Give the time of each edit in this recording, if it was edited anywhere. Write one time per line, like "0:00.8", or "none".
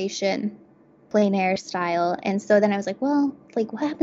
0:01.0